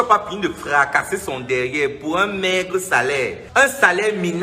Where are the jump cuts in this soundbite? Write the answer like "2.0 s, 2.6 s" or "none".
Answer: 3.4 s